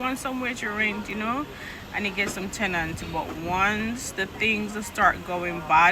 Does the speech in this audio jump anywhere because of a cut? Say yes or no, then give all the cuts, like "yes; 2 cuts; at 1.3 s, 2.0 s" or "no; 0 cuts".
no; 0 cuts